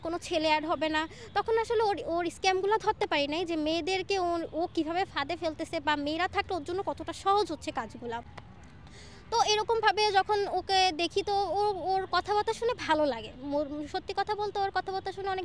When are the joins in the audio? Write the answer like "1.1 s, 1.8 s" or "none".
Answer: none